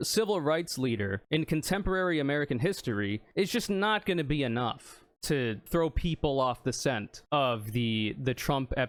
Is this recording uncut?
yes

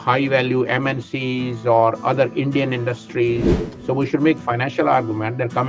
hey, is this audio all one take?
no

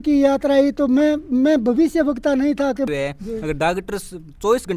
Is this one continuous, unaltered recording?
no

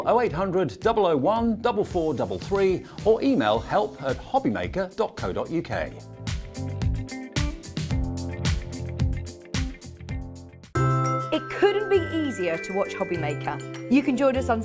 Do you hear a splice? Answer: yes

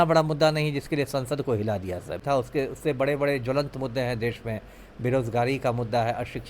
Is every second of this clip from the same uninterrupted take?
no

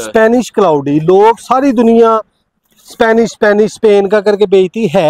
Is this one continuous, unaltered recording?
yes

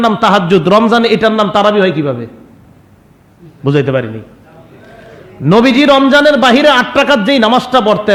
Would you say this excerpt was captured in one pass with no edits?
yes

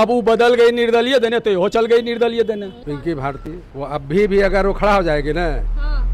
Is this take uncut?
no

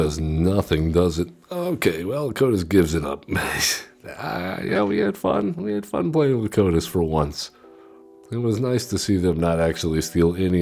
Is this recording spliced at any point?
no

